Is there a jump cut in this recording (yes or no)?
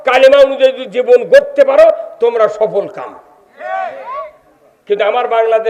no